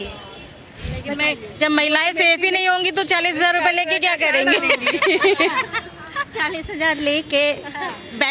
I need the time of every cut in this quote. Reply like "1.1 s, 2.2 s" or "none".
none